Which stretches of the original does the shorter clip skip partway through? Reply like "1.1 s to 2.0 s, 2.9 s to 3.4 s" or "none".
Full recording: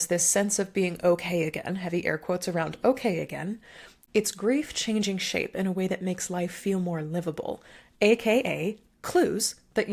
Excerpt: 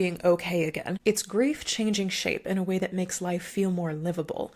1.7 s to 4.0 s